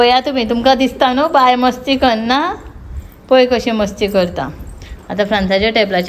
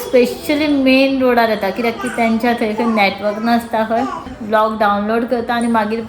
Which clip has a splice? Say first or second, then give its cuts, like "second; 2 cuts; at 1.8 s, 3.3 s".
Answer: second; 1 cut; at 4.3 s